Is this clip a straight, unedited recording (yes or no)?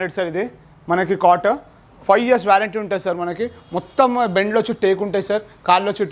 yes